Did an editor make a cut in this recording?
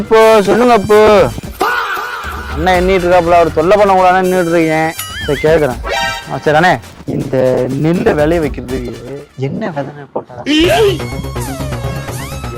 no; 0 cuts

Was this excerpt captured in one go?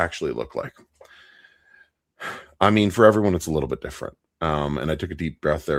yes; 0 cuts

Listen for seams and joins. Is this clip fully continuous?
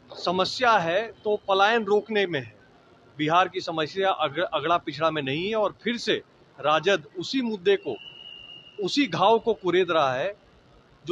yes; 0 cuts

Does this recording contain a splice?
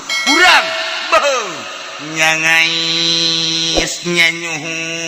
no; 0 cuts

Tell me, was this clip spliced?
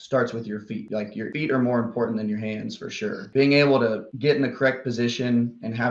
yes; 2 cuts; at 1.3 s, 3.3 s

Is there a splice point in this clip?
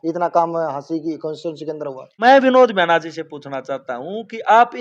yes; 1 cut; at 2.0 s

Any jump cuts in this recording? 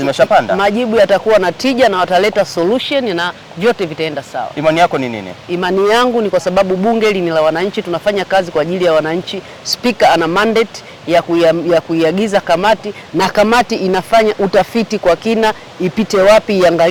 no; 0 cuts

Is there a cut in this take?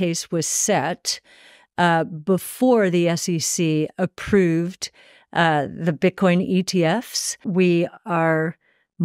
yes; 1 cut; at 7.4 s

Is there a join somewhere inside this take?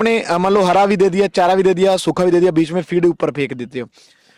no; 0 cuts

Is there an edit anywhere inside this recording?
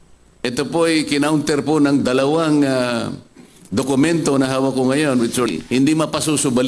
yes; 1 cut; at 5.5 s

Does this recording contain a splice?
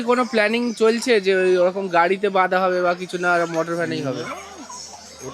no; 0 cuts

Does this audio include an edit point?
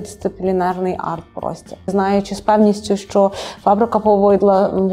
yes; 1 cut; at 1.9 s

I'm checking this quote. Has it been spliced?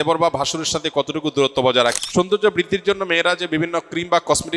yes; 1 cut; at 2.0 s

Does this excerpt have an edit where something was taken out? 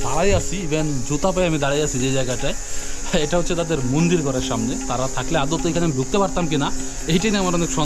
no; 0 cuts

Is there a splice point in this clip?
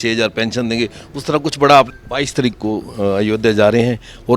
yes; 1 cut; at 2.0 s

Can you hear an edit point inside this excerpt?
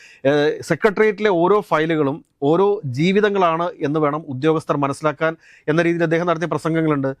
no; 0 cuts

